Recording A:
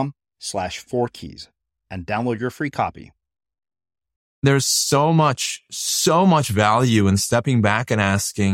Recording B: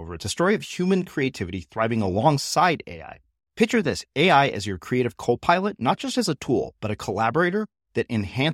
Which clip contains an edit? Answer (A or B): A